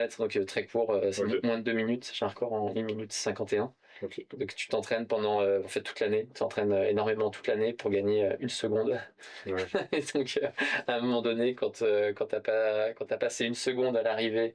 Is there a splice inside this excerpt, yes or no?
no